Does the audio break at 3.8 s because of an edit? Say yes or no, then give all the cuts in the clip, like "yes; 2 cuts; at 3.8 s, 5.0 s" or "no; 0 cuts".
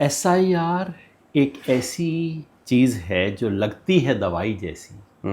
no; 1 cut; at 2.5 s